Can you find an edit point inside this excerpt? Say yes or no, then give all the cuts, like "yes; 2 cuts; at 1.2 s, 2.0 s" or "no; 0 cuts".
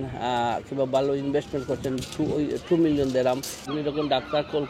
yes; 1 cut; at 3.7 s